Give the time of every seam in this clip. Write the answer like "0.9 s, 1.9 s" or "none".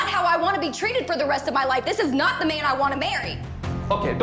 none